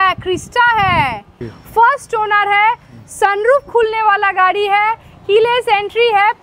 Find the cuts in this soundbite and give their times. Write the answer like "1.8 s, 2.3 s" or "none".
1.5 s